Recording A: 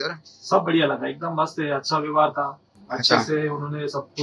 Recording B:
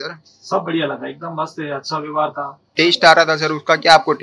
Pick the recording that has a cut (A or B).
B